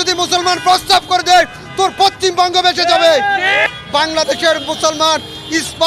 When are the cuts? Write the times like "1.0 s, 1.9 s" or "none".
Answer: 3.6 s